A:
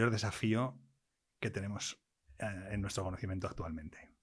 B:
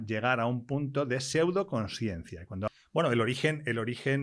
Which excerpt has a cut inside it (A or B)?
B